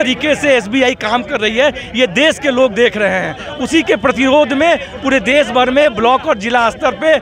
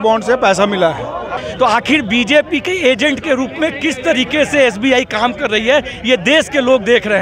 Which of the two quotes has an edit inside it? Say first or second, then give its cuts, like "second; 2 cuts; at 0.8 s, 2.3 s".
second; 1 cut; at 1.4 s